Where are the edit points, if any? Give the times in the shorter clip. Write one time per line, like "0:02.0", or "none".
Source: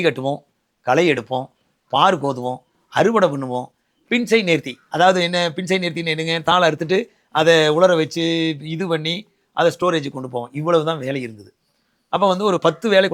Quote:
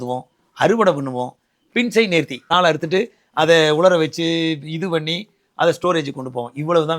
0:02.5